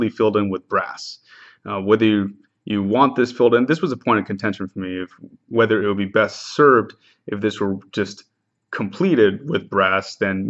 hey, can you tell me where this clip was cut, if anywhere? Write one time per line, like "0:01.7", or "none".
0:04.6